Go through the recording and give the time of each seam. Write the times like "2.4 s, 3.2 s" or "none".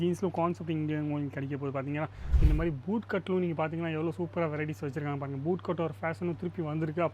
2.2 s